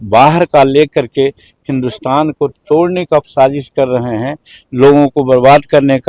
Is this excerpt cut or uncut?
uncut